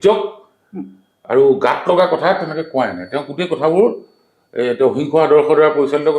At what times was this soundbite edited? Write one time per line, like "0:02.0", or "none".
none